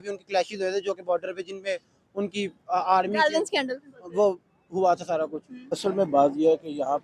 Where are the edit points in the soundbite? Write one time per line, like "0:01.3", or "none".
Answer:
0:05.6